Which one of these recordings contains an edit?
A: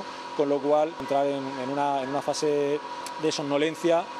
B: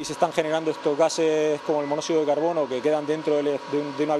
A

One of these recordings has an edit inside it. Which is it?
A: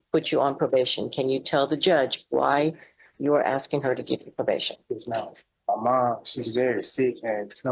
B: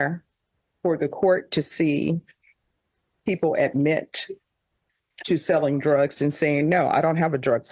A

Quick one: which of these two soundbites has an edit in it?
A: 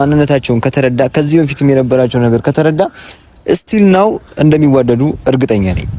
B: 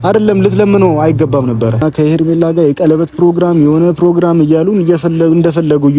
B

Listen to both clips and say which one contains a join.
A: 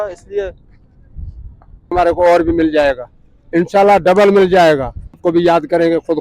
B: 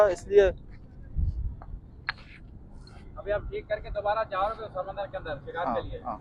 A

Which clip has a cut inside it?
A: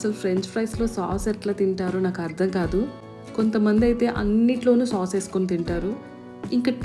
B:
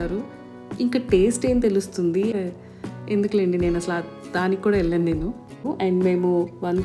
B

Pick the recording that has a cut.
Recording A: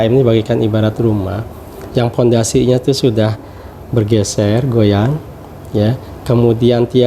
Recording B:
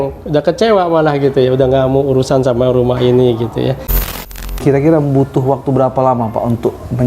B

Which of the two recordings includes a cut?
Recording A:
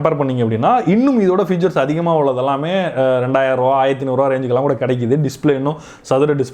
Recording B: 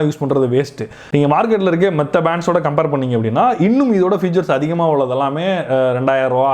B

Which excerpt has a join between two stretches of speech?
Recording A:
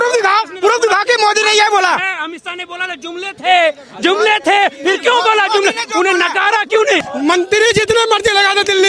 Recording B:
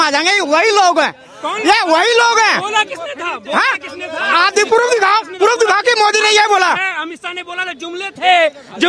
A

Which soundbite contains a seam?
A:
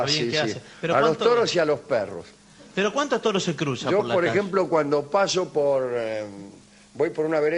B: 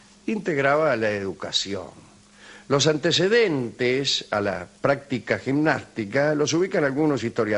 B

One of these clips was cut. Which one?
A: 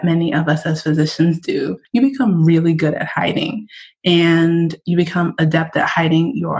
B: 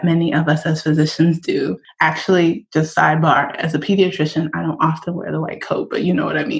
A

